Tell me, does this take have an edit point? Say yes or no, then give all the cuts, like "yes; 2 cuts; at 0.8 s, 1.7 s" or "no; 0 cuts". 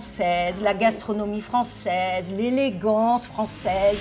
no; 0 cuts